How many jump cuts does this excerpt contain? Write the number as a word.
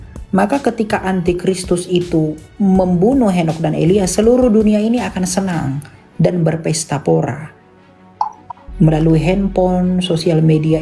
zero